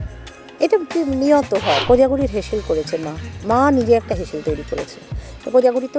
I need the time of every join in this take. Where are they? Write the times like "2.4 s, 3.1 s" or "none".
1.8 s